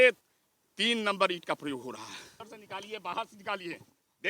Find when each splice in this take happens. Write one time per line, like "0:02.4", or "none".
0:02.3